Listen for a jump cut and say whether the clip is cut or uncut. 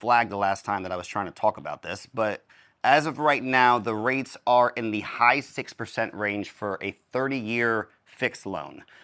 uncut